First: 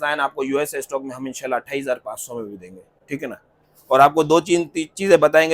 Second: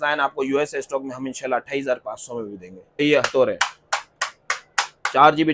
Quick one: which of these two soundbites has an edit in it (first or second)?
second